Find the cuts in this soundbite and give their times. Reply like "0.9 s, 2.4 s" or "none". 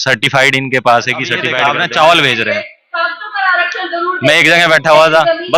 1.5 s